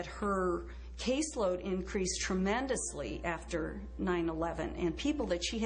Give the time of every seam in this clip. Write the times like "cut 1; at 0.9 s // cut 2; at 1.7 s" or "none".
cut 1; at 2.8 s